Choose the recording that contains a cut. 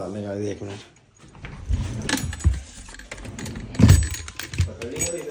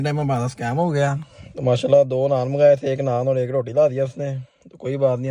first; 1 cut; at 1.6 s

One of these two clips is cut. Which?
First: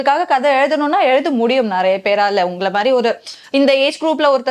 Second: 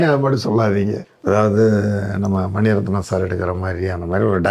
second; 1 cut; at 1.1 s

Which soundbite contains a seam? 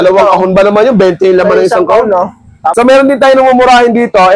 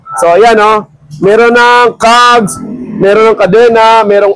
first; 1 cut; at 2.6 s

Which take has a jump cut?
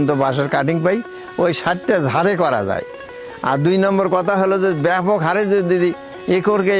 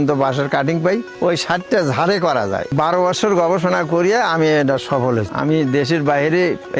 second; 3 cuts; at 1.1 s, 2.7 s, 5.3 s

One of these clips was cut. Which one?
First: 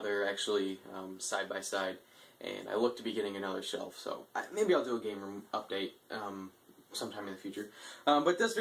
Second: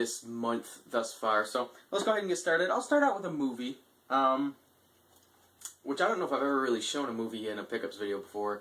second; 1 cut; at 3.0 s

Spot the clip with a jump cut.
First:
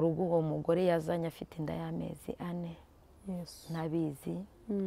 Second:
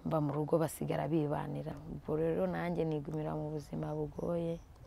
second; 1 cut; at 1.8 s

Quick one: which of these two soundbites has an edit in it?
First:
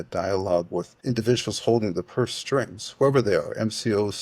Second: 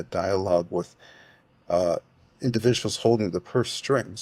first; 1 cut; at 0.9 s

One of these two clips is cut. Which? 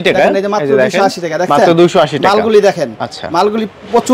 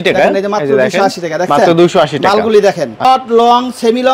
second; 1 cut; at 3.0 s

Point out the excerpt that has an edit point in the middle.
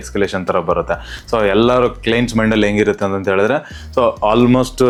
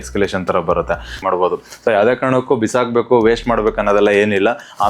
second; 1 cut; at 1.2 s

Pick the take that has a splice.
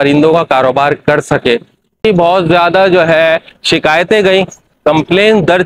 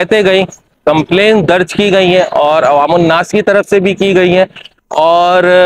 first; 1 cut; at 2.0 s

